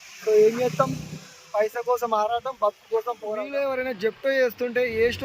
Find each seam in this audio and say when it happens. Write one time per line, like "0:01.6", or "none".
0:03.4